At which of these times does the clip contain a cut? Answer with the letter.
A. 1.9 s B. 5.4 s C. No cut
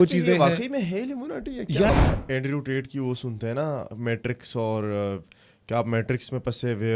A